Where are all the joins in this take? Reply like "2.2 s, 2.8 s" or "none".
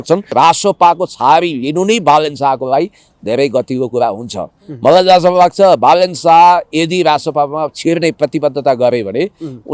none